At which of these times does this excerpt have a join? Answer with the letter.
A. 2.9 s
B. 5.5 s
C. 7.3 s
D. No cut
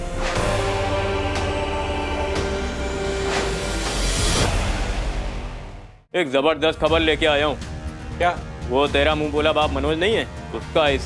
B